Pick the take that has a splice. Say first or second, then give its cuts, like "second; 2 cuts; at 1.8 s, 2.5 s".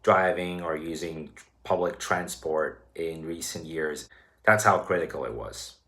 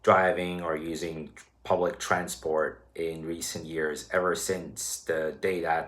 first; 1 cut; at 4.0 s